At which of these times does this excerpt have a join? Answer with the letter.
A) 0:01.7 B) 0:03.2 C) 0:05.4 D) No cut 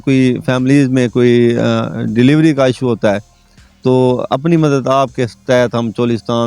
D